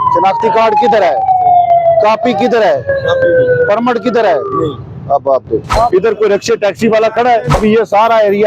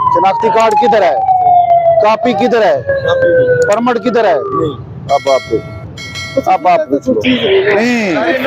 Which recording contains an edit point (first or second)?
first